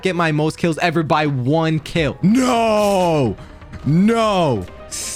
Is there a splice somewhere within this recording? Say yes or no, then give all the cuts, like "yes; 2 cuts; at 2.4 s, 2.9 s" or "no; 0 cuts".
no; 0 cuts